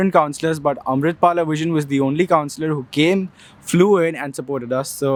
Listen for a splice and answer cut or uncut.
uncut